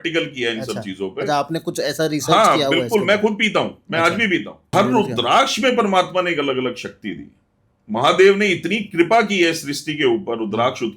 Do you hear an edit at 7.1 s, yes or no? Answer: no